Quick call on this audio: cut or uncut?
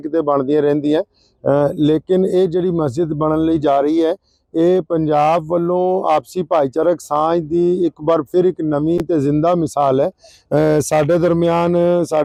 uncut